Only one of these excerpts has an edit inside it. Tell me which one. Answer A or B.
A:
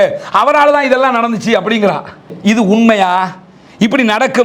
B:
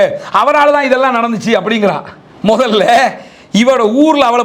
A